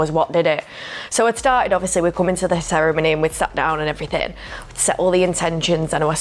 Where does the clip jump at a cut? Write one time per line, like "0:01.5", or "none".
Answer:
none